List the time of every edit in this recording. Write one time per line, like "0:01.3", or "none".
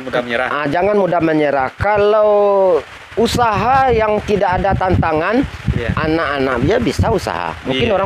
none